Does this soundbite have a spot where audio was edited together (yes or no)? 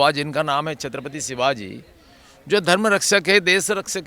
no